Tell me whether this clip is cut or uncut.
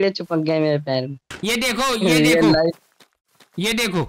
cut